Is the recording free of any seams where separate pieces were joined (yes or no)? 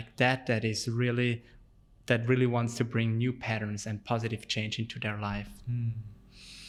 yes